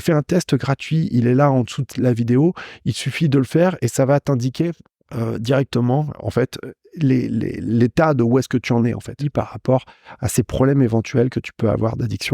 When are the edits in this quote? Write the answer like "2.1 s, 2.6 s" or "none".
9.2 s